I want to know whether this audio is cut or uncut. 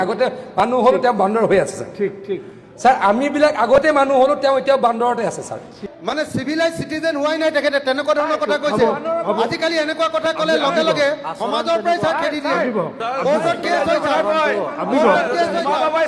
cut